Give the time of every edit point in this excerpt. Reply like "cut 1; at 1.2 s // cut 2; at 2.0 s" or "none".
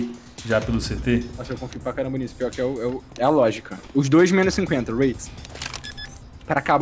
none